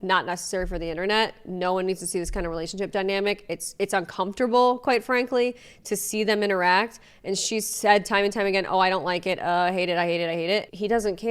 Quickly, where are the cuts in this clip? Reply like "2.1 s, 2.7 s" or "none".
none